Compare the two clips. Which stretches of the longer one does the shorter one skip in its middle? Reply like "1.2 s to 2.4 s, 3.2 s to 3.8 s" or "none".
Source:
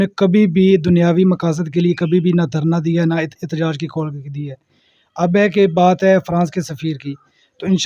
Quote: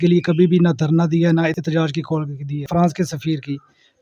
3.3 s to 3.4 s, 4.5 s to 6.3 s